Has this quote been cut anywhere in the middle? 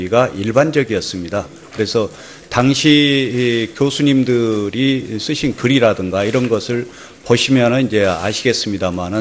yes; 1 cut; at 4.4 s

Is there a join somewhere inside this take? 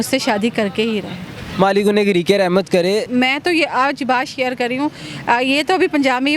yes; 1 cut; at 3.1 s

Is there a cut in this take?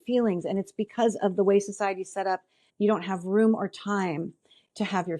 yes; 1 cut; at 2.6 s

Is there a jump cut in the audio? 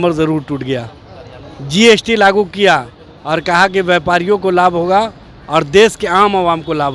no; 0 cuts

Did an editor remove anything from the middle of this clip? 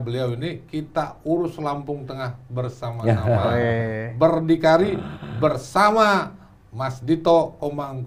no; 0 cuts

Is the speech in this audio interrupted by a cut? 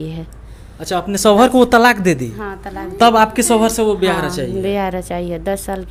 no; 0 cuts

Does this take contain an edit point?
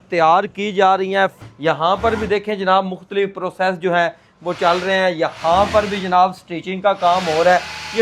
yes; 1 cut; at 1.4 s

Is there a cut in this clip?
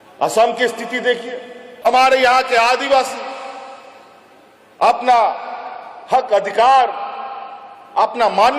yes; 1 cut; at 1.7 s

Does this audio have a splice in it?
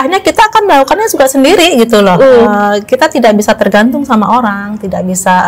no; 0 cuts

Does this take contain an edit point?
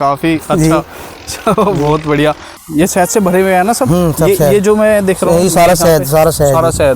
yes; 1 cut; at 2.5 s

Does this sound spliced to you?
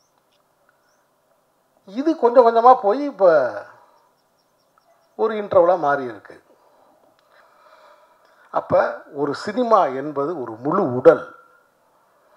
yes; 1 cut; at 7.3 s

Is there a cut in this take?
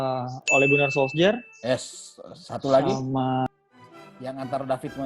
yes; 1 cut; at 3.5 s

